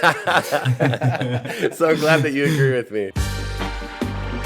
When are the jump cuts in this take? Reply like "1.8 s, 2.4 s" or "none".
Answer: 3.2 s